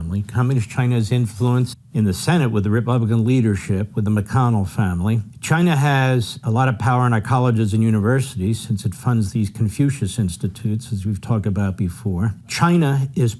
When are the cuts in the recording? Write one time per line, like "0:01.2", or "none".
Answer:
0:01.3
0:05.3
0:06.4
0:12.5

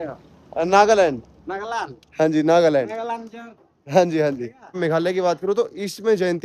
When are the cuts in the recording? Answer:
0:04.8

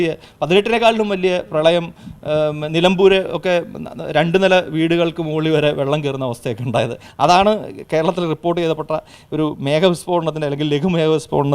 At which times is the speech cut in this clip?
none

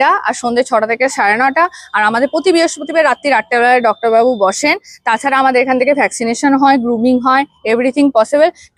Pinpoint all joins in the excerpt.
none

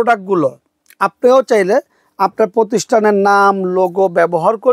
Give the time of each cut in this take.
none

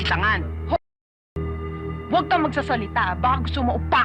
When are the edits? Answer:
none

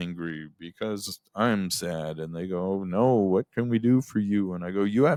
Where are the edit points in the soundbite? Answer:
none

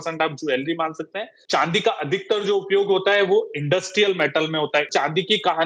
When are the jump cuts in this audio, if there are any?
0:01.3
0:04.9

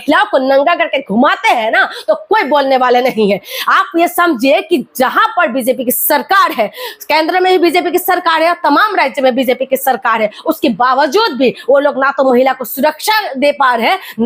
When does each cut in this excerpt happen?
none

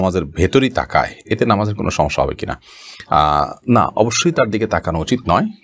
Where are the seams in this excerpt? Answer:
none

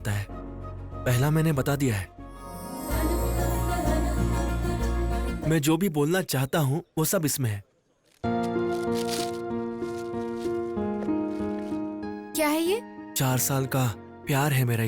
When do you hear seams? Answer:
0:02.6
0:05.4

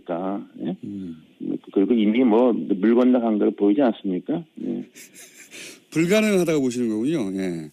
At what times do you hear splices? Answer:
none

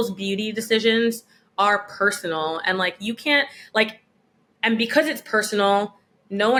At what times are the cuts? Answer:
none

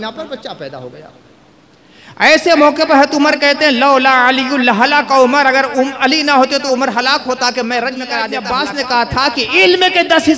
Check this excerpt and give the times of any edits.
0:08.3

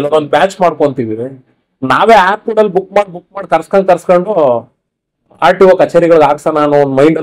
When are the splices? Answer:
none

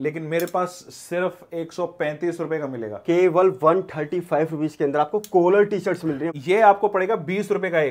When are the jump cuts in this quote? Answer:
0:06.3

